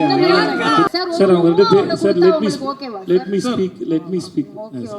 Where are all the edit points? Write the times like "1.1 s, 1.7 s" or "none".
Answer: 0.9 s